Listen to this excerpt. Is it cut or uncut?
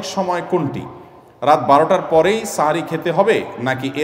uncut